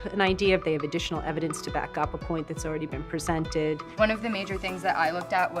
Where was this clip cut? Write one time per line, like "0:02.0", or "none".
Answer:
0:03.9